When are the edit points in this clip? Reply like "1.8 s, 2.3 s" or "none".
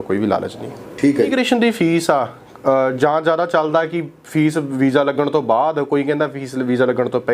1.3 s